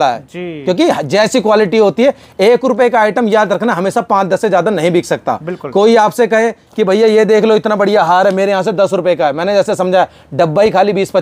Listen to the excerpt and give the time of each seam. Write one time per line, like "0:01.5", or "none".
none